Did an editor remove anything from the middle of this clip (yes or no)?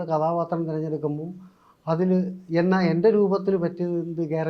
no